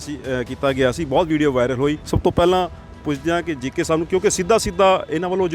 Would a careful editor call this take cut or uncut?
cut